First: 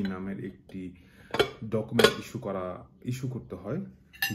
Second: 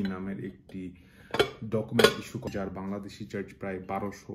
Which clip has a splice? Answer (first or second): second